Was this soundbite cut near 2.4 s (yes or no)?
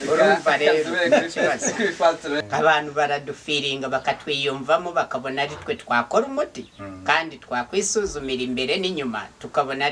yes